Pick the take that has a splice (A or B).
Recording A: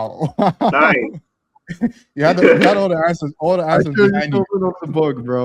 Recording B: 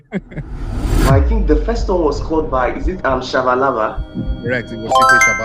B